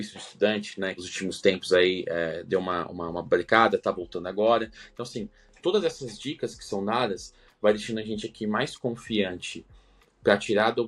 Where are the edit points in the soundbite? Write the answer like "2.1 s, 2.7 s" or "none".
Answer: none